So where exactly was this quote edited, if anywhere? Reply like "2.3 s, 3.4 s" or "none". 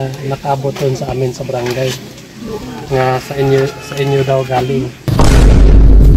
2.1 s, 5.0 s